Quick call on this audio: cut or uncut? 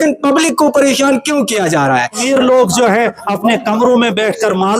cut